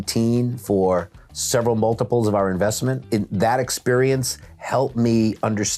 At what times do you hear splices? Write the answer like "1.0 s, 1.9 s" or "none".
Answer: none